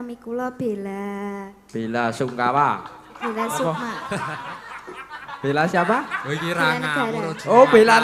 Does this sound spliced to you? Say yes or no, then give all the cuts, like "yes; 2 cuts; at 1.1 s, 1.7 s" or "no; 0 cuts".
no; 0 cuts